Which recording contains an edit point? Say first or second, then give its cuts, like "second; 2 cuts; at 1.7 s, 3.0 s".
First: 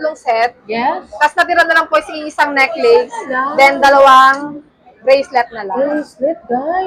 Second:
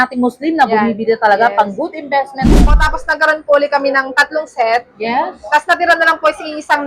second; 1 cut; at 2.7 s